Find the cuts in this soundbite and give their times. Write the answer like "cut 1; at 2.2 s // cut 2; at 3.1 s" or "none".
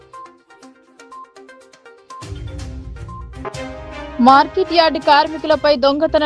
none